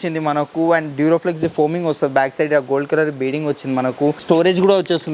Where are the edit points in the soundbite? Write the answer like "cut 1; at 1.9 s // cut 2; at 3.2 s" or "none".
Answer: cut 1; at 4.2 s